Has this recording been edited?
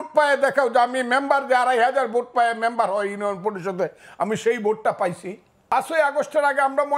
yes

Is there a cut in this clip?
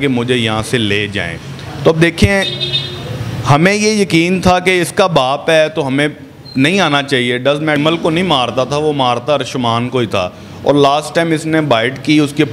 yes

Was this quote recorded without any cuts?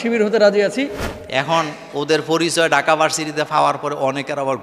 no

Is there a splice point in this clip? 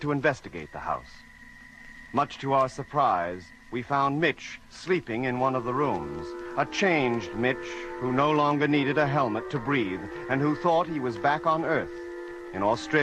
yes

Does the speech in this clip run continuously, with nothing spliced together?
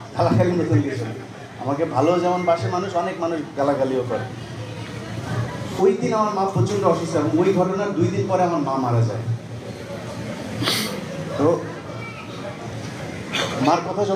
yes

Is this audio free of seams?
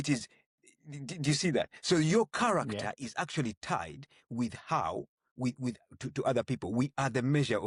yes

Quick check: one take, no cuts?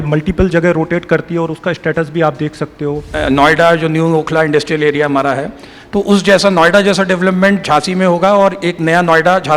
no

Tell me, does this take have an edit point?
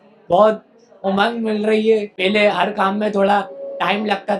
yes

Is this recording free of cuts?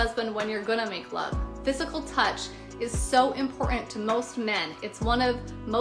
no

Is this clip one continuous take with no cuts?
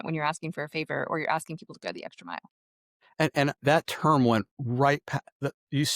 no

